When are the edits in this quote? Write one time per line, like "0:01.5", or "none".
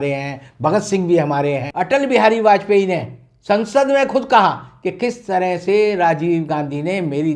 0:01.7